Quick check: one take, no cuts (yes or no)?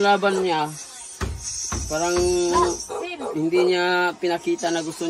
yes